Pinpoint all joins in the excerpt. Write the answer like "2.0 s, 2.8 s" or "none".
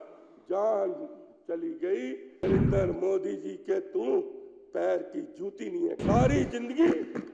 2.4 s, 6.0 s